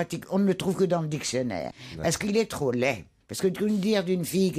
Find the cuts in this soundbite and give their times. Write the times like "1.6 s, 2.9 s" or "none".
3.1 s